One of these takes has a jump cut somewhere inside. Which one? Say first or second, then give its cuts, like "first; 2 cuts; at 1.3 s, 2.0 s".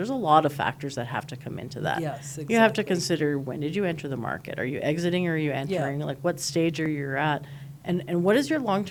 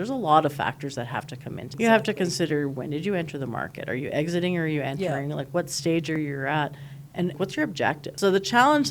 second; 2 cuts; at 1.6 s, 7.3 s